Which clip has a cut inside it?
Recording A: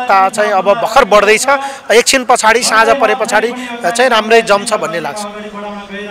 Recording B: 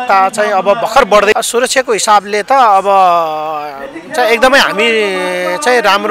B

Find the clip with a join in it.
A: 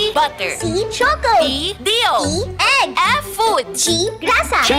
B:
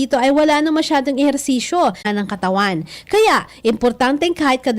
B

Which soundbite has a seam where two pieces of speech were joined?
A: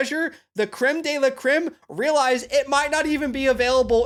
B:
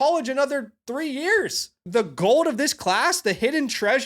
B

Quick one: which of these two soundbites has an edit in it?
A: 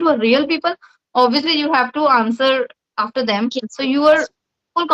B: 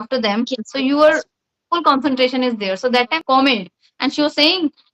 B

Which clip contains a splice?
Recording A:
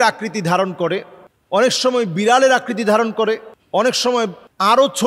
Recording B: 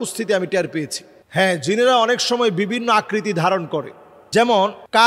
B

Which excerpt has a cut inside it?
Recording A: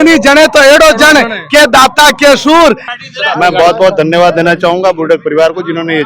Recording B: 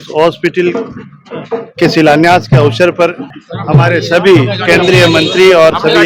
A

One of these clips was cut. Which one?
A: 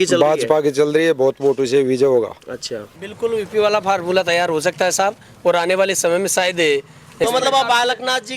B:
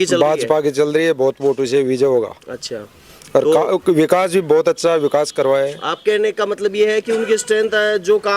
A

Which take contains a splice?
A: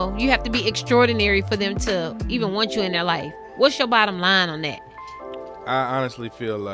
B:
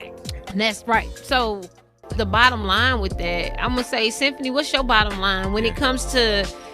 B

